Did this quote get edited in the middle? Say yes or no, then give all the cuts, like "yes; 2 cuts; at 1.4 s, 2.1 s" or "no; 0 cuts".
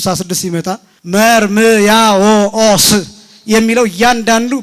yes; 1 cut; at 0.9 s